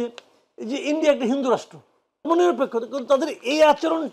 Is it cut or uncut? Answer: cut